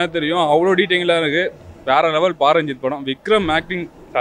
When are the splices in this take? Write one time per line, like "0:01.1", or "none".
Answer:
none